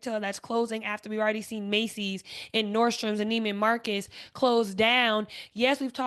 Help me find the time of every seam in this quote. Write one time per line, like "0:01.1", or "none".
none